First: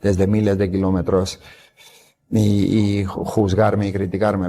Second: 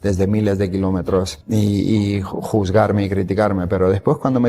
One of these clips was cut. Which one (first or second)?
second